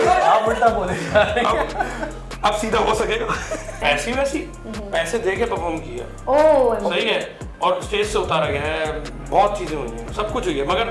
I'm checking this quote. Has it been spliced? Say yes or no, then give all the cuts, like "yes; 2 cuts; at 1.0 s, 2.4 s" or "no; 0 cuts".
yes; 1 cut; at 3.7 s